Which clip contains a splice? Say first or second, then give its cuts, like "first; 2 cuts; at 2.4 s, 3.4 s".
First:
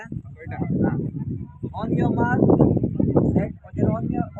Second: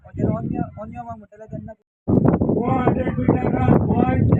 second; 1 cut; at 1.8 s